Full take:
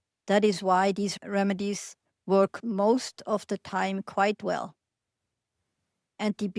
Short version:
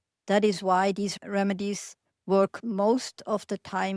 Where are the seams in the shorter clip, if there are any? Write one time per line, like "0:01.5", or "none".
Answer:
none

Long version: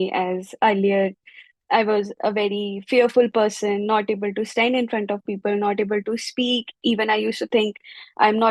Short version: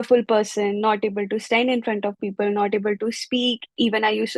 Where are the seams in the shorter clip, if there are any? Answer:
none

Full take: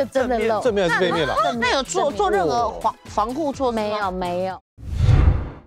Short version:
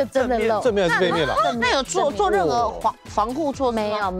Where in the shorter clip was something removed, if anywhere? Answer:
none

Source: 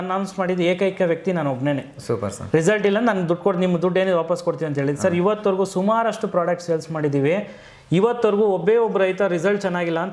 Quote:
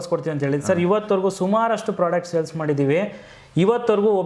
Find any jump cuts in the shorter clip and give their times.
none

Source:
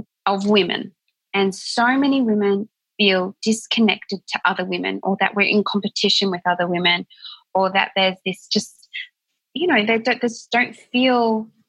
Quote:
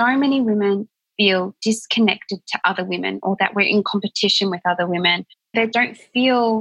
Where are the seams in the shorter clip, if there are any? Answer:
0:05.6

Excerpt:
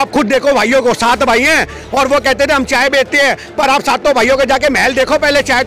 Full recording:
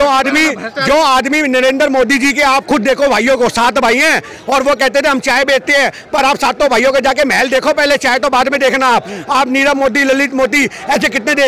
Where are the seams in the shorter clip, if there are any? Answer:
none

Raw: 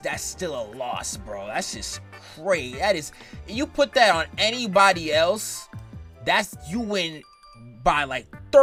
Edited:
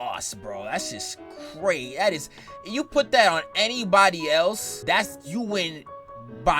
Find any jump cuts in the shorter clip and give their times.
0:04.7

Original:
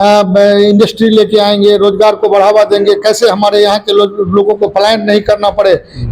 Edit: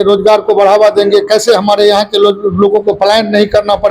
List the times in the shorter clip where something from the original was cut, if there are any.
none

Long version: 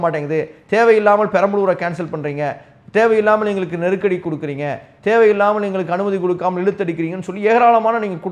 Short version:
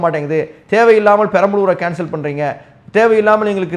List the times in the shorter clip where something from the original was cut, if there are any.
none

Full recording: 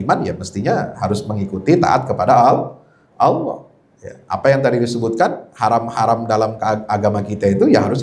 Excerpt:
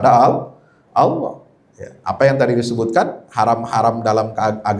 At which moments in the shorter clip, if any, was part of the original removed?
none

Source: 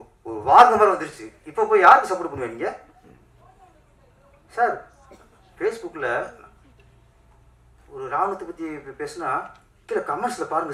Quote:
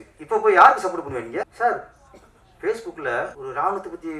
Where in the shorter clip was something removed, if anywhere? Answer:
0:01.5
0:03.4

